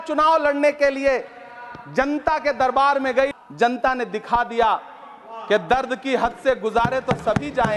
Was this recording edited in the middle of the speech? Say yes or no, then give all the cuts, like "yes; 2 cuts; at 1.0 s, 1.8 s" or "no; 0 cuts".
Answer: yes; 1 cut; at 3.3 s